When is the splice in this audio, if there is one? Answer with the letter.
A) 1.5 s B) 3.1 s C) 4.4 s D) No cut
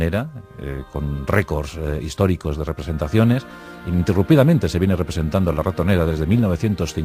A